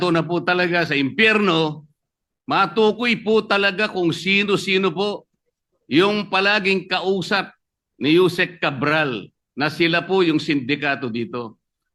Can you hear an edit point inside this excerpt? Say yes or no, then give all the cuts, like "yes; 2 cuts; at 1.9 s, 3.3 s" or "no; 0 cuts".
no; 0 cuts